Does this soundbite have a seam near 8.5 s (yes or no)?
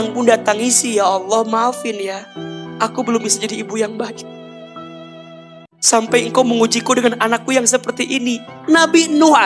yes